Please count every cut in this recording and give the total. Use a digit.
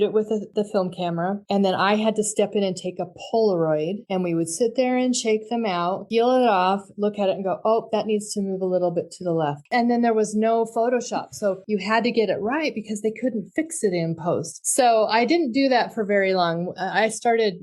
3